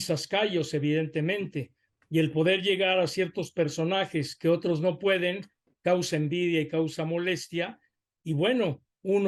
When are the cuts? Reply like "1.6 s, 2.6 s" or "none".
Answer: none

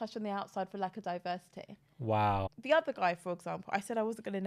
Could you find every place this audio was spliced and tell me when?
2.5 s

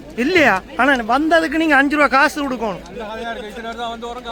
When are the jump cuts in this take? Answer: none

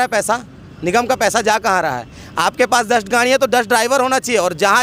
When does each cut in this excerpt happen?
none

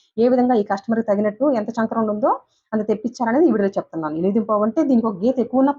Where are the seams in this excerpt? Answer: none

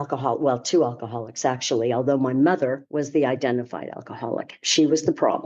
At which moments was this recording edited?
none

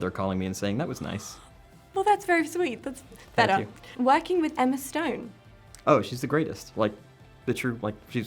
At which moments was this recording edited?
none

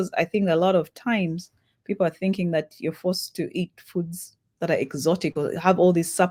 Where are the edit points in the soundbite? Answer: none

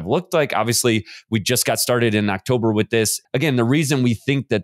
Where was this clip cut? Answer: 3.2 s

